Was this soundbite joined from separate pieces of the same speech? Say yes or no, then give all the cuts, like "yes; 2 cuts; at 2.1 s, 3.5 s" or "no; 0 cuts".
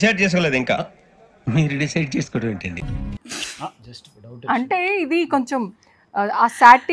no; 0 cuts